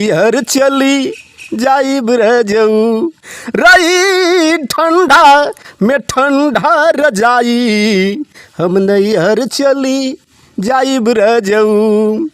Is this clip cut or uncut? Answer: uncut